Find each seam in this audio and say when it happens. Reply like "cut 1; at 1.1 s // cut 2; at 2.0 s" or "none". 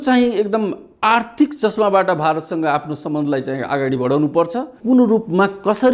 cut 1; at 4.8 s